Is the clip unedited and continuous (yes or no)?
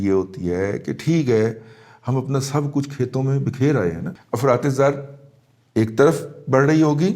no